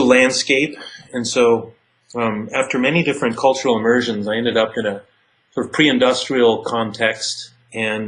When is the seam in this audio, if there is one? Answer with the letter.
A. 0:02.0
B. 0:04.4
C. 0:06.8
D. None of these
D